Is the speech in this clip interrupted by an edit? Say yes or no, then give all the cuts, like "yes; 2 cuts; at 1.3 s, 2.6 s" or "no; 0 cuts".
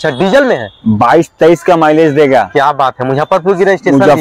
no; 0 cuts